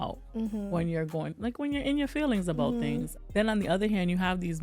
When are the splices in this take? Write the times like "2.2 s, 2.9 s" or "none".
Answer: 3.2 s